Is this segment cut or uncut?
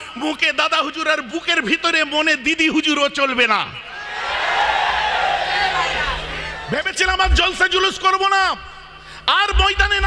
cut